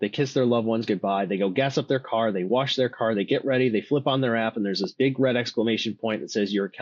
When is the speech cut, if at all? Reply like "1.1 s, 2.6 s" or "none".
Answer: none